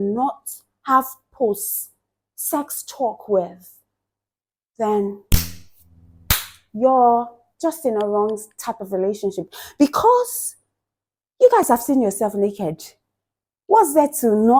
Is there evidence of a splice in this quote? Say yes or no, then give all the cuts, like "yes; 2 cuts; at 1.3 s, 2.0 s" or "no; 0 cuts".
no; 0 cuts